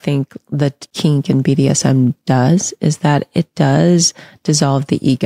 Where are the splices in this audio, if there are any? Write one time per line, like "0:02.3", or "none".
0:00.9

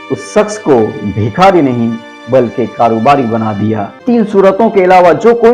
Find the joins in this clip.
0:04.0

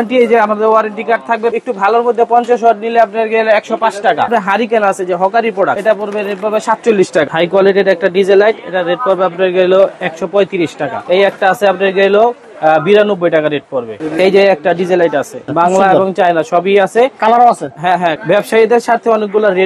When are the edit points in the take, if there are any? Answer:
0:01.5
0:04.3
0:05.8
0:07.3
0:10.9
0:13.9
0:15.4
0:18.2

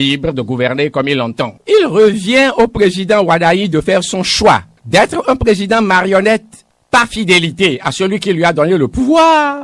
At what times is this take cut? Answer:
0:01.6

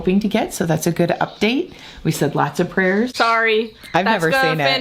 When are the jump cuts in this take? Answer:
0:03.1

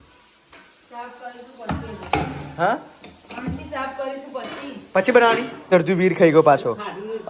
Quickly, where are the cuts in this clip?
0:05.7

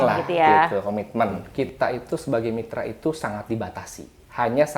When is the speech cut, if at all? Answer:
0:01.4

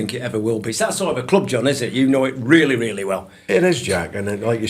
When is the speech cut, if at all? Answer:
none

